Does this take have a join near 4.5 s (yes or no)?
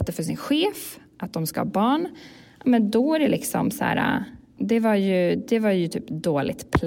yes